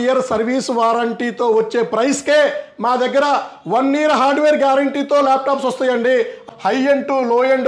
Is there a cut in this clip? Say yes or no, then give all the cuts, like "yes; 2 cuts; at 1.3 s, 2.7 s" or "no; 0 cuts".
yes; 1 cut; at 6.5 s